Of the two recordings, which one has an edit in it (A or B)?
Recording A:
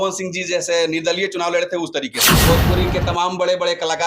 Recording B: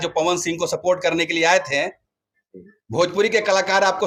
A